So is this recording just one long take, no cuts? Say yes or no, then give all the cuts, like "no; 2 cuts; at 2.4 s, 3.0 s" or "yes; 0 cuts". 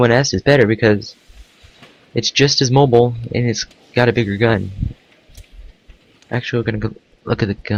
yes; 0 cuts